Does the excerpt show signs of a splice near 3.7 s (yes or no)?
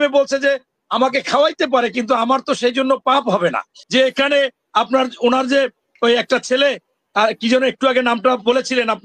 yes